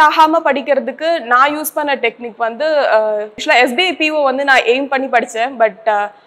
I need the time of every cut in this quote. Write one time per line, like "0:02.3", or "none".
0:03.4